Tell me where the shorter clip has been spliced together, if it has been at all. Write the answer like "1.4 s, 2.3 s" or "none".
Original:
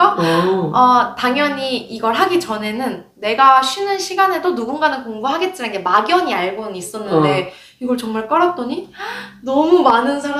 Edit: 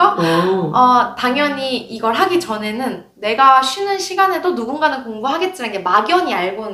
none